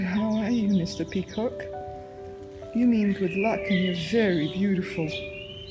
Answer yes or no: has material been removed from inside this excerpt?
no